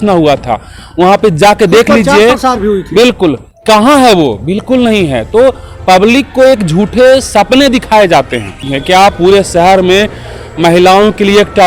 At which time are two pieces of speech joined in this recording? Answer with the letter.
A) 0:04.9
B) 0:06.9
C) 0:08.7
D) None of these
C